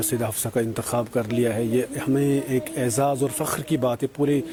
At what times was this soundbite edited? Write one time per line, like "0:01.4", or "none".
none